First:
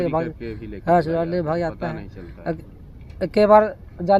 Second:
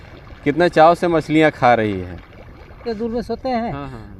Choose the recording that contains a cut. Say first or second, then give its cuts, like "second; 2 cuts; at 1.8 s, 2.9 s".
second; 1 cut; at 2.8 s